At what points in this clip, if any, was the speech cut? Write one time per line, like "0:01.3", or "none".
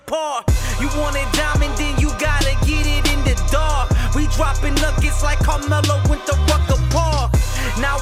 none